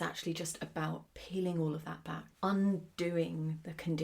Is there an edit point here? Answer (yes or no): yes